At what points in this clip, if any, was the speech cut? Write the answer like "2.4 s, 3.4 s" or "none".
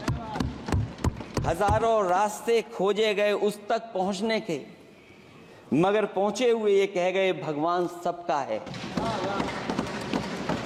none